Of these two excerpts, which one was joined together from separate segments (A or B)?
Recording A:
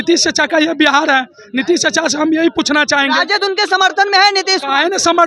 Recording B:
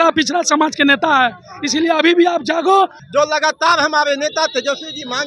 B